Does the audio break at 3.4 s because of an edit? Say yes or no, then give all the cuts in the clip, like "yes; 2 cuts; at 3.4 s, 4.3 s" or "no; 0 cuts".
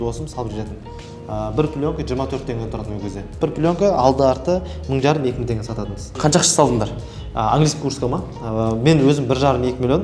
yes; 2 cuts; at 3.4 s, 6.1 s